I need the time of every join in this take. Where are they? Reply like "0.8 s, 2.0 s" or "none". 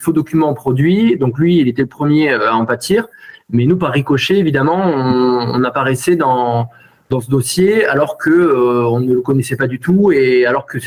none